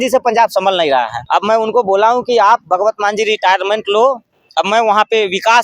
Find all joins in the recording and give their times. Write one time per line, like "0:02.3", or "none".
0:01.2